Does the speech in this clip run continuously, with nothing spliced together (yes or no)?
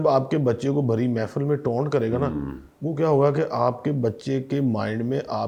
yes